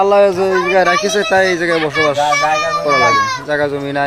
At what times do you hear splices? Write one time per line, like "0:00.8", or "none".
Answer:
none